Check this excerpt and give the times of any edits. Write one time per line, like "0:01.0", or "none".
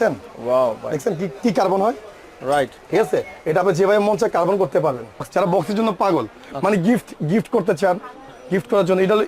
0:05.3